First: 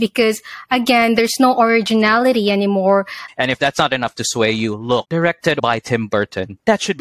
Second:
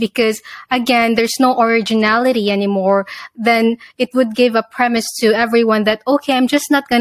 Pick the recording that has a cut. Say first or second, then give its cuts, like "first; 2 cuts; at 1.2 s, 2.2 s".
first; 2 cuts; at 3.2 s, 5.6 s